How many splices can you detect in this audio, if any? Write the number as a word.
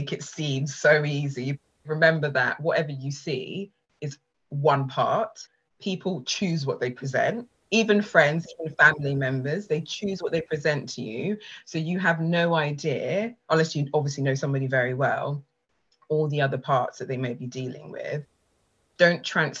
one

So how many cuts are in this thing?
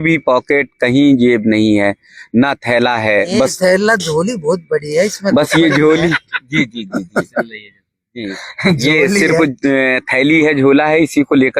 zero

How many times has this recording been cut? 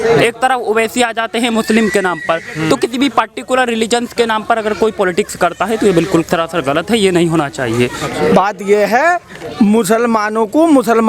one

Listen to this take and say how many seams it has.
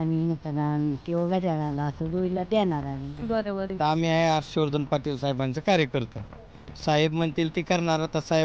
one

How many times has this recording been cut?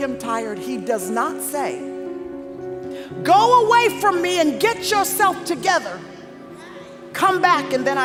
zero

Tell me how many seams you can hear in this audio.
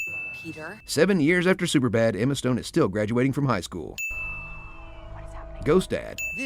one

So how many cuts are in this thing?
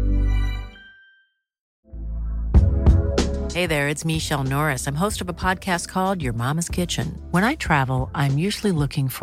one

